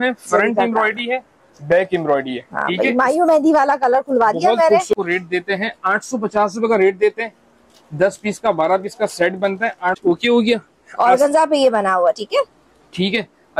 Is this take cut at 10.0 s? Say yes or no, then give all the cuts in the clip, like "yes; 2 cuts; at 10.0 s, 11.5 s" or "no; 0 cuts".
yes; 2 cuts; at 4.9 s, 10.0 s